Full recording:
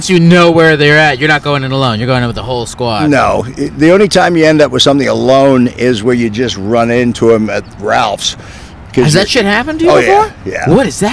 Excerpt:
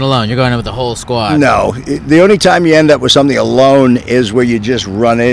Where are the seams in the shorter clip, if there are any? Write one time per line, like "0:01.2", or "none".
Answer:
none